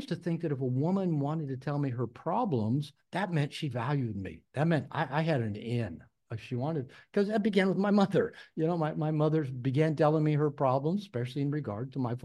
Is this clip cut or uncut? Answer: uncut